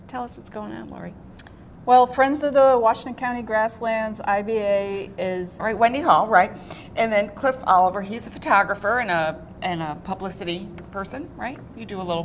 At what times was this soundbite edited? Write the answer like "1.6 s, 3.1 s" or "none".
none